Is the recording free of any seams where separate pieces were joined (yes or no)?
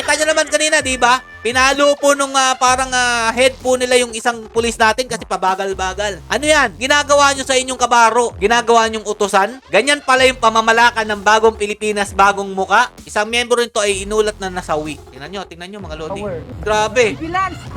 no